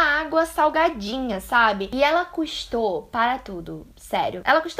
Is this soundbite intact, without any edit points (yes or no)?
no